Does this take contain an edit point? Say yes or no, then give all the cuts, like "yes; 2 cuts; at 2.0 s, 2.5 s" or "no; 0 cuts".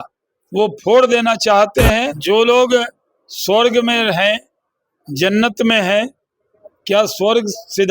yes; 1 cut; at 2.2 s